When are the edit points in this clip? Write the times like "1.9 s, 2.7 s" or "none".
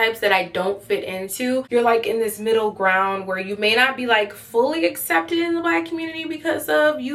1.7 s